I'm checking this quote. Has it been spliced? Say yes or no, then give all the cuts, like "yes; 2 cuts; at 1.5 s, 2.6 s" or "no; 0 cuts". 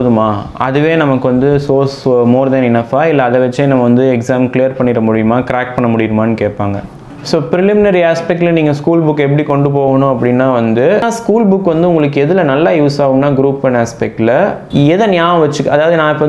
yes; 3 cuts; at 6.9 s, 11.1 s, 14.6 s